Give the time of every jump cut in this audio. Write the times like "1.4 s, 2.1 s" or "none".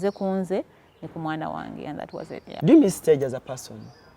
2.6 s